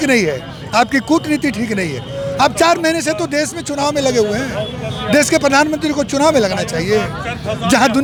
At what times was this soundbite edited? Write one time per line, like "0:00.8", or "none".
none